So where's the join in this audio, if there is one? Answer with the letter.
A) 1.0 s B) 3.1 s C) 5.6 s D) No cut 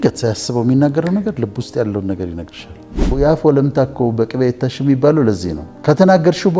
B